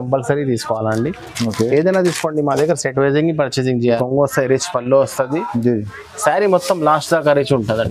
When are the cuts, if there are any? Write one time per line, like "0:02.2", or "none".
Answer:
0:04.0